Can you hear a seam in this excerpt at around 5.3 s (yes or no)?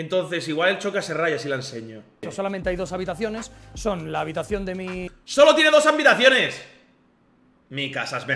no